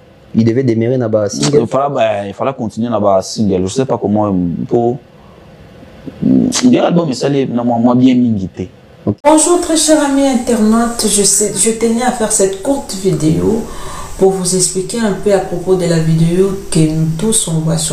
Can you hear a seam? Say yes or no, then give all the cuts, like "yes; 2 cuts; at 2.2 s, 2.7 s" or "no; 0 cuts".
yes; 1 cut; at 9.2 s